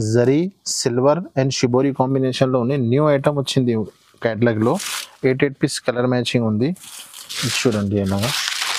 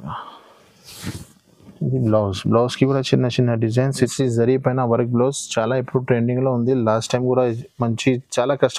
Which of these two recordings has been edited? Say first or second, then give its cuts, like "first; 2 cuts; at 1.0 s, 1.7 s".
second; 1 cut; at 4.1 s